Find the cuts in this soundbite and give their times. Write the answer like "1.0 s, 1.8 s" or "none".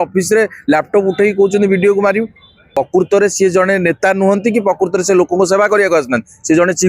2.6 s